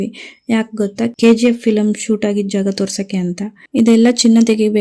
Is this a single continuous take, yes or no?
no